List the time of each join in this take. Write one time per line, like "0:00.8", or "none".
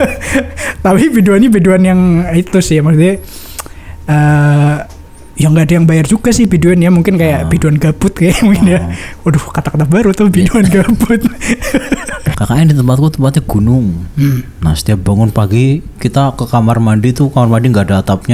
0:12.3